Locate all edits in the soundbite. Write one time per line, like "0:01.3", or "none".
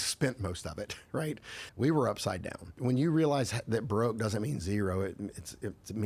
0:01.6